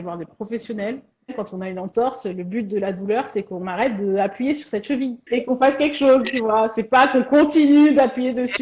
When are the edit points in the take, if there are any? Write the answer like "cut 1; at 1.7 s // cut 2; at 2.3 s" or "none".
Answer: cut 1; at 1.3 s // cut 2; at 5.2 s

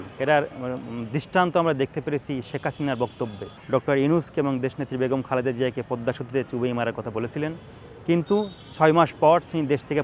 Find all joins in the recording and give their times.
none

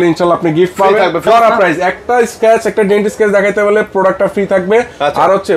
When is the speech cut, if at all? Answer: cut 1; at 1.2 s

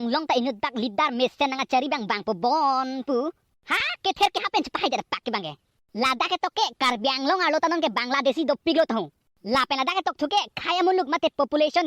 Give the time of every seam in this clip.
cut 1; at 5.5 s

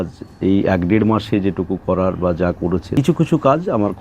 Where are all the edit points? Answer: cut 1; at 2.9 s

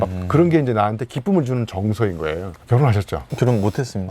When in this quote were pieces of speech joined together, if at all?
cut 1; at 2.6 s

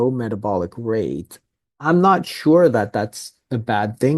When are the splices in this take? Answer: none

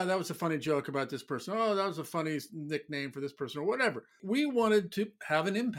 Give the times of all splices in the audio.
none

